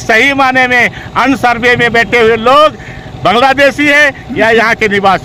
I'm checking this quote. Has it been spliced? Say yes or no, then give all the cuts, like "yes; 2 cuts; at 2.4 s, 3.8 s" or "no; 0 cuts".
no; 0 cuts